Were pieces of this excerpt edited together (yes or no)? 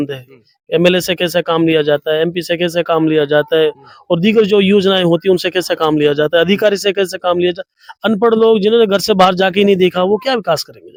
no